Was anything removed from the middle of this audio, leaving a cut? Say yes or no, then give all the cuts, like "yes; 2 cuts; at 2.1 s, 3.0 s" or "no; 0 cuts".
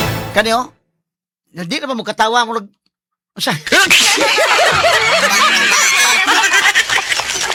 no; 0 cuts